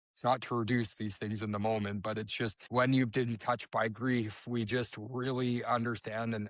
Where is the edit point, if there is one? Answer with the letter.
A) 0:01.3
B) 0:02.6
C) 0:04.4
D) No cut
B